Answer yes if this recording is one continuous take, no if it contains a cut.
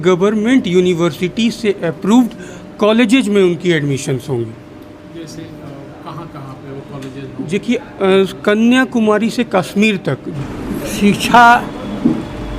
no